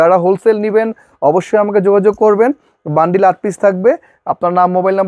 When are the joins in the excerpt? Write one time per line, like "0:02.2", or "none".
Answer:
none